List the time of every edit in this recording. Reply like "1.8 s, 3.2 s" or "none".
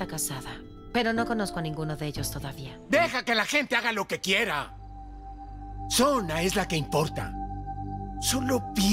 2.7 s